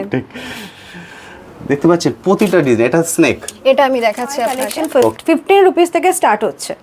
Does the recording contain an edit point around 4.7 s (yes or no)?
yes